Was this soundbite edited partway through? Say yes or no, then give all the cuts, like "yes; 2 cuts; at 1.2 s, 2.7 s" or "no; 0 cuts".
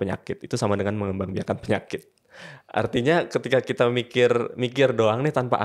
no; 0 cuts